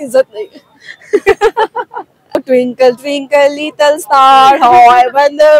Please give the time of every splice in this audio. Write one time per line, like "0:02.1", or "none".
0:02.4